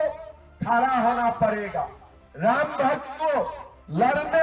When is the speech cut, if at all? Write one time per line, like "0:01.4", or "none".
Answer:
none